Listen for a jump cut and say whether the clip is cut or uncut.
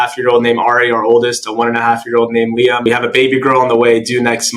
uncut